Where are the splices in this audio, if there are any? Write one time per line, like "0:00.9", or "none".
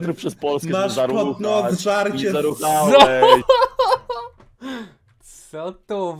0:02.8